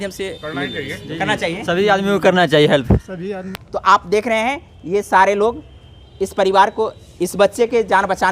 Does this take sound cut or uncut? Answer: cut